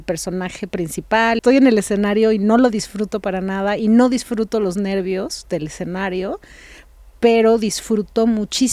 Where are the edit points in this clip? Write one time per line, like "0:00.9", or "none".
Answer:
0:01.4